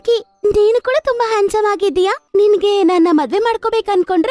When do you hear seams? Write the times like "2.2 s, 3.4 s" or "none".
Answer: 2.2 s